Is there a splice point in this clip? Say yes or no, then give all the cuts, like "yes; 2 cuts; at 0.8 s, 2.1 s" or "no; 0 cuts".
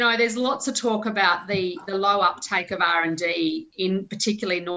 no; 0 cuts